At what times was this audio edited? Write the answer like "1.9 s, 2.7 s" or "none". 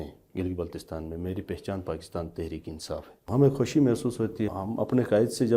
3.3 s, 4.5 s